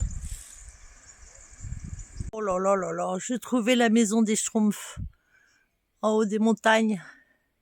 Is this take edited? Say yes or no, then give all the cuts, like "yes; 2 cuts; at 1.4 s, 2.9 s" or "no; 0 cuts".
yes; 1 cut; at 2.3 s